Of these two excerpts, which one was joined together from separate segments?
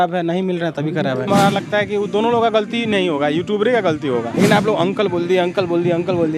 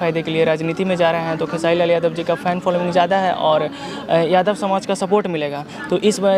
first; 2 cuts; at 1.3 s, 4.3 s

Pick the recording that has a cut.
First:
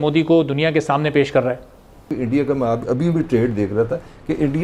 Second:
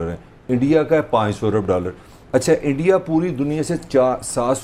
first; 1 cut; at 2.1 s

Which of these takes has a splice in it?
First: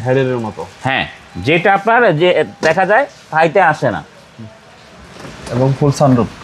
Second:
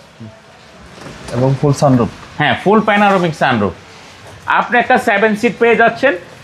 second; 1 cut; at 4.3 s

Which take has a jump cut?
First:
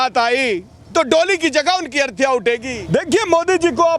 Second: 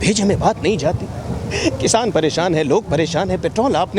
first; 1 cut; at 2.7 s

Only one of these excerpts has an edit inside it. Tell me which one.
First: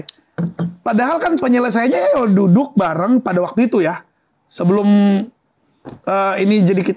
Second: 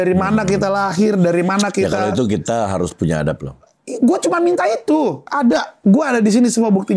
second; 1 cut; at 5.3 s

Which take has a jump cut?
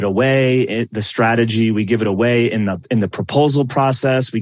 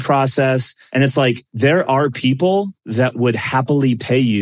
second; 2 cuts; at 1.1 s, 2.8 s

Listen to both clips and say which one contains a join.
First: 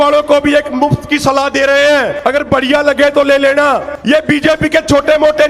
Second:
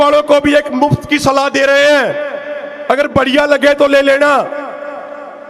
first; 2 cuts; at 2.1 s, 3.9 s

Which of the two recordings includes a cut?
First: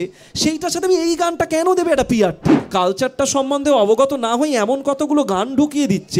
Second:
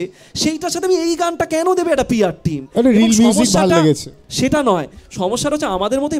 first; 1 cut; at 2.6 s

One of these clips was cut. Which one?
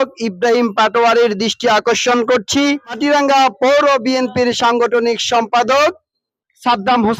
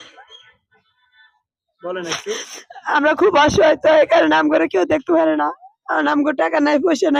first; 1 cut; at 3.0 s

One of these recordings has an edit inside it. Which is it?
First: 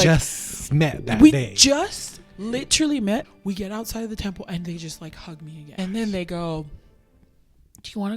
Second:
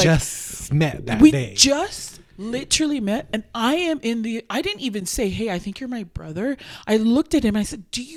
first; 2 cuts; at 3.3 s, 5.7 s

